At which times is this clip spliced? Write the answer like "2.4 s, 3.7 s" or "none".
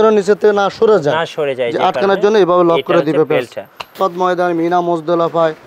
4.0 s